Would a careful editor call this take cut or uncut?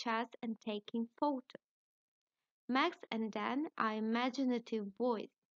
uncut